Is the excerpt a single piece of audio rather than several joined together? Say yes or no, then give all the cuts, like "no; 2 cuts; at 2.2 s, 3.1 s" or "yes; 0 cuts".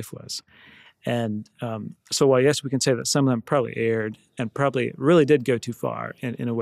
yes; 0 cuts